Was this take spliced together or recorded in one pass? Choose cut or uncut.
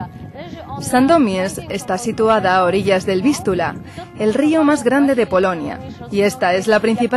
cut